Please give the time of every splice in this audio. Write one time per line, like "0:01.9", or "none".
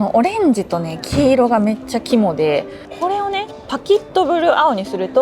0:02.8